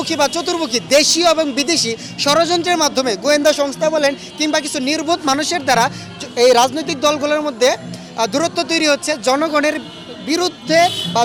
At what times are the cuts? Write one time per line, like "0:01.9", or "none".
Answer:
none